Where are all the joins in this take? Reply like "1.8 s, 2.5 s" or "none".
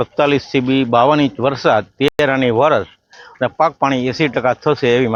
none